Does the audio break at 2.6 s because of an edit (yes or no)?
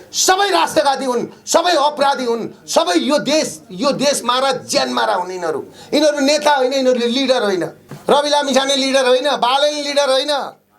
no